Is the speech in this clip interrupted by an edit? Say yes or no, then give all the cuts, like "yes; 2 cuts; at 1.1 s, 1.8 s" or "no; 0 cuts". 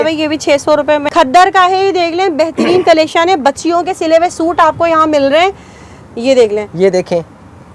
yes; 1 cut; at 1.1 s